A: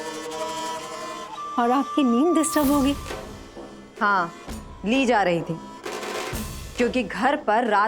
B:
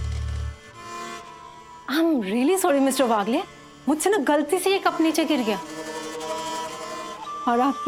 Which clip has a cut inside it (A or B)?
A